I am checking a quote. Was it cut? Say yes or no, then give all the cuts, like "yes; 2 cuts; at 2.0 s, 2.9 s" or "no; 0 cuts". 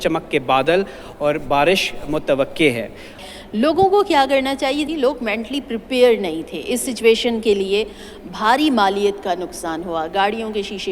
yes; 2 cuts; at 3.2 s, 4.9 s